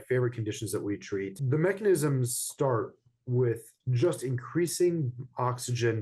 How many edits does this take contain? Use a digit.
1